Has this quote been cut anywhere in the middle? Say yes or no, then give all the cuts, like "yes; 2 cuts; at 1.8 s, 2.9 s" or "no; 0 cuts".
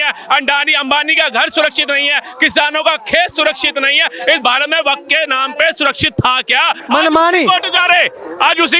no; 0 cuts